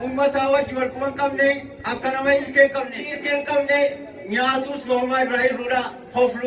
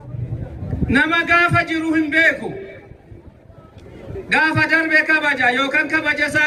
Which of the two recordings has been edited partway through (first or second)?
first